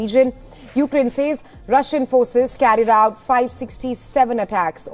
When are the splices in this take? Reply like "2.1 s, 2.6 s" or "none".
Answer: none